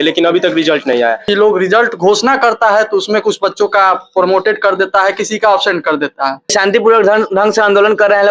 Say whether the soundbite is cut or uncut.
cut